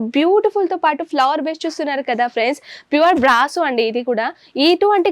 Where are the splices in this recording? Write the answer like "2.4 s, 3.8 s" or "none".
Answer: none